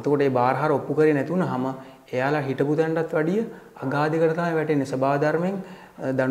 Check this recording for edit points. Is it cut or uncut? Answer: uncut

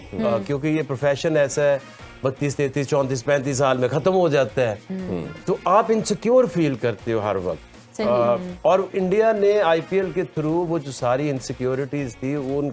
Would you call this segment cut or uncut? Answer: uncut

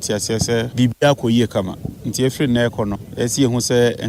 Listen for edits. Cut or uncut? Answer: uncut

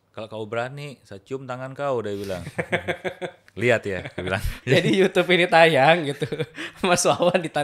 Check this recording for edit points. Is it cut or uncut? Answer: cut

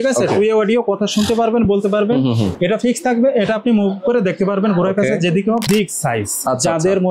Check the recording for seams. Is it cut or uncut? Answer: cut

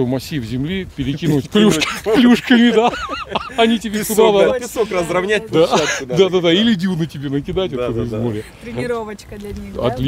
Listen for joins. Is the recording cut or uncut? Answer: uncut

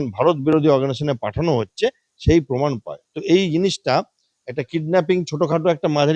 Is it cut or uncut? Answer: uncut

